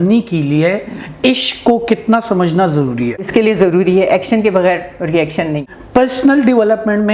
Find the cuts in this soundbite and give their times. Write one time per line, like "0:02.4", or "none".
0:03.3
0:05.7